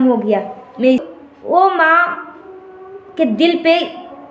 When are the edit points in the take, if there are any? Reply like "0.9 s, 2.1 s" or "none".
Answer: 1.0 s